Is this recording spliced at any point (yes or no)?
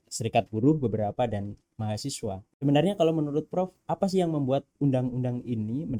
no